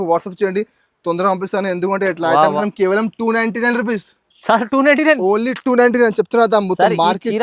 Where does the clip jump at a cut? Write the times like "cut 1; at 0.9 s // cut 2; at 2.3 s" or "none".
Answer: cut 1; at 2.6 s